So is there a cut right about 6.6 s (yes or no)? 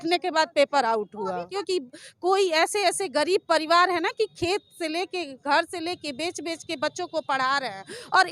no